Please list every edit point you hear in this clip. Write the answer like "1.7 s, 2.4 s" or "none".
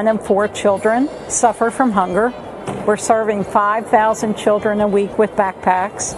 1.2 s